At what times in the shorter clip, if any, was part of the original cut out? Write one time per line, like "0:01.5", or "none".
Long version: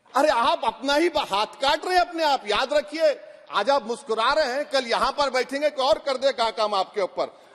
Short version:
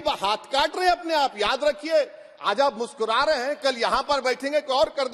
none